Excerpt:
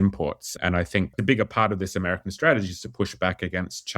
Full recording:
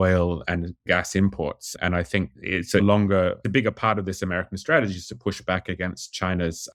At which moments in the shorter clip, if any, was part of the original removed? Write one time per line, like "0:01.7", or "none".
0:01.2